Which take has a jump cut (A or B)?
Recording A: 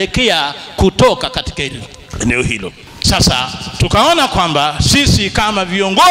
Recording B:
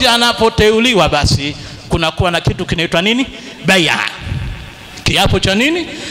A